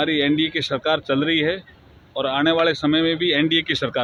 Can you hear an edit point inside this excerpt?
no; 0 cuts

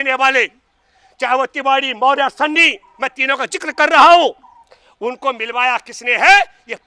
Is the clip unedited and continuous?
yes; 0 cuts

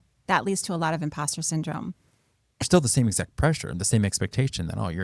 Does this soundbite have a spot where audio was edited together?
yes; 1 cut; at 2.6 s

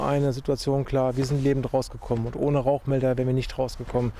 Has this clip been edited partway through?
no; 0 cuts

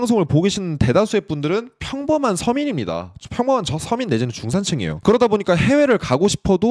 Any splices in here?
no; 0 cuts

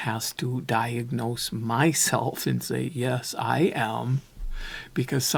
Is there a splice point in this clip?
no; 0 cuts

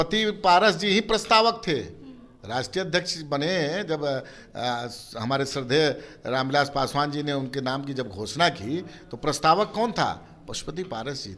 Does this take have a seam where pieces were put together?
no; 0 cuts

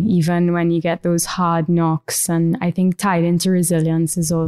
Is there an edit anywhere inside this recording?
no; 0 cuts

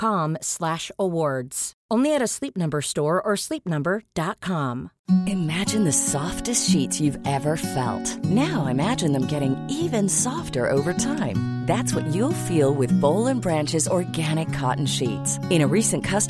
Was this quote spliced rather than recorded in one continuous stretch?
yes; 1 cut; at 4.9 s

